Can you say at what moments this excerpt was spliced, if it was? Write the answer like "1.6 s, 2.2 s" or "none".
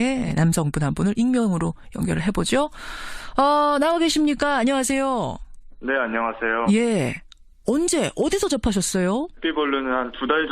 4.0 s